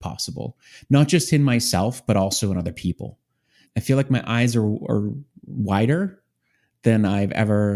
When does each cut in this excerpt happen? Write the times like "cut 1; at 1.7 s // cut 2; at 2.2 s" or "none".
none